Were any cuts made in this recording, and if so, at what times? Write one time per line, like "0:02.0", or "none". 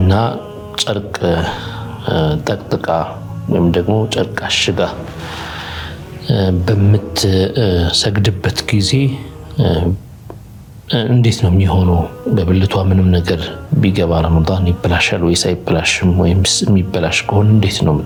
none